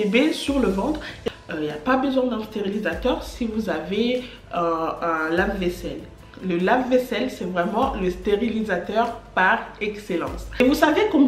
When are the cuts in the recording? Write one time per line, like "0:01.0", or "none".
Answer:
0:01.2
0:10.6